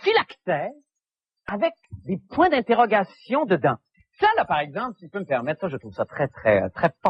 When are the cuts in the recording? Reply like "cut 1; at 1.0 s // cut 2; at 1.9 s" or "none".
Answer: none